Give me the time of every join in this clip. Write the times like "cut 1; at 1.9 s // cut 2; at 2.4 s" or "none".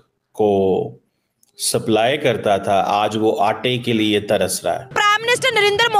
cut 1; at 4.9 s